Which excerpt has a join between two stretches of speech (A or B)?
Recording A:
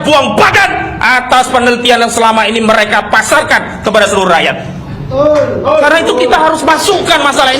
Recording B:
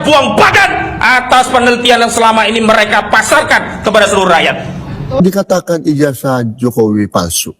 B